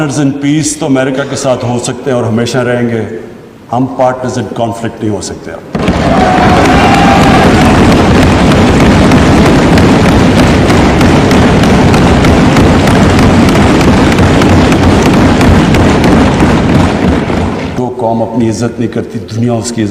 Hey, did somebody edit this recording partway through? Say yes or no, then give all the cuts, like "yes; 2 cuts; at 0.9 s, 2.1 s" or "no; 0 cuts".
yes; 1 cut; at 17.7 s